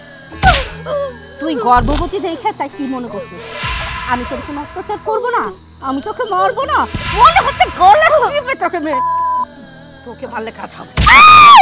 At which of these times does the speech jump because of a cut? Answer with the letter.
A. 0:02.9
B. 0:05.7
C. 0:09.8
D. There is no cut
D